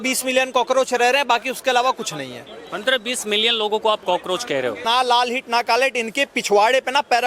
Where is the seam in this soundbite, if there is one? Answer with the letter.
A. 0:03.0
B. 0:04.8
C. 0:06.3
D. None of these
B